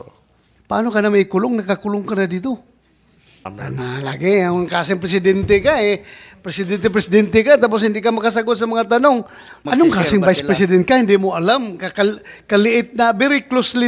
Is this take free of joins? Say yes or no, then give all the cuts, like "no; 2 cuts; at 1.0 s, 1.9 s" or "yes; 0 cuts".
no; 2 cuts; at 3.5 s, 9.5 s